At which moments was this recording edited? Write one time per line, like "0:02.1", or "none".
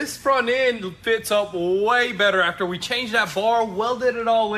none